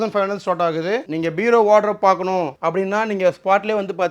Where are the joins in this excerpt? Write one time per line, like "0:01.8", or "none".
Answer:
0:01.1
0:02.6